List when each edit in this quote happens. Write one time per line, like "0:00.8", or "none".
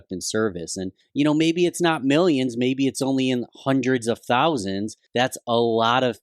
0:01.0
0:04.9